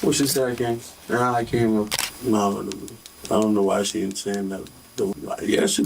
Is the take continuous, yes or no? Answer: no